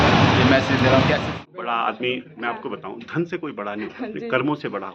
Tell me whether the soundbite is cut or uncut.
cut